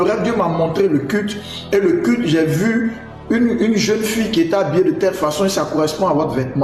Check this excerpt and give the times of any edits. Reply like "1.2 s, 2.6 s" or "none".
none